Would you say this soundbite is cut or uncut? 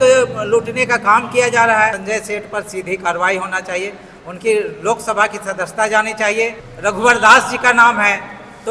cut